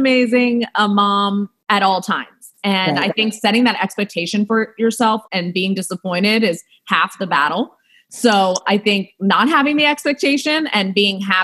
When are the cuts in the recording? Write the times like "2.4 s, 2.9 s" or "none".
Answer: 5.2 s